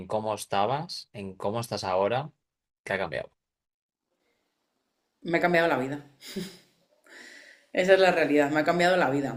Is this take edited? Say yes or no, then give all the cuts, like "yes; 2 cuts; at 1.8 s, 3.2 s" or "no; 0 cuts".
no; 0 cuts